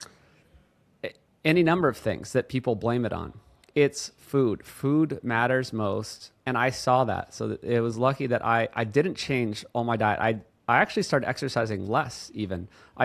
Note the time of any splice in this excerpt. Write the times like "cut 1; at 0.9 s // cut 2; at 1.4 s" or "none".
none